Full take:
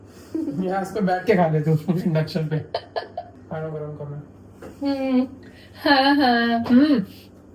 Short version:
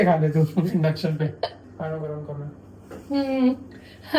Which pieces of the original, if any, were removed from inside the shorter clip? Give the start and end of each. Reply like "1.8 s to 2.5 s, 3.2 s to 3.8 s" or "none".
2.9 s to 3.3 s